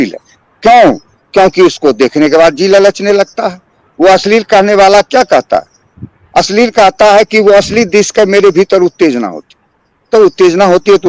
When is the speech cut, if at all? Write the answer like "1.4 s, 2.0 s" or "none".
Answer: none